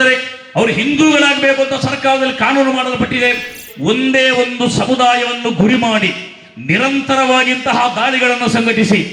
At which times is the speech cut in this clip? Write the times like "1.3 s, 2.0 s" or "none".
3.6 s